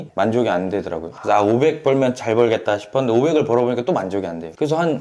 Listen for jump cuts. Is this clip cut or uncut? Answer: uncut